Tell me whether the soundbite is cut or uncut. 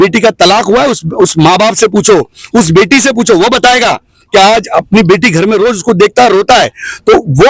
uncut